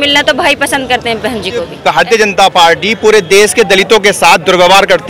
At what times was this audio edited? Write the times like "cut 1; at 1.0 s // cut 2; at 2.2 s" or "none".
cut 1; at 1.7 s